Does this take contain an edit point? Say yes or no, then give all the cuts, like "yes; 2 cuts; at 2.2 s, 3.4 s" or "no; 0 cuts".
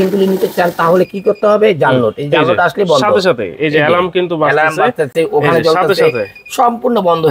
no; 0 cuts